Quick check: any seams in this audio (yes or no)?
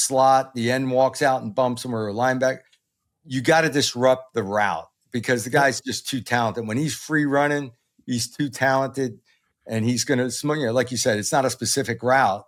no